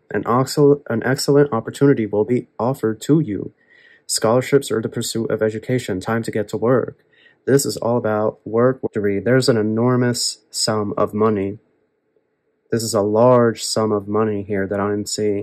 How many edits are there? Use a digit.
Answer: 1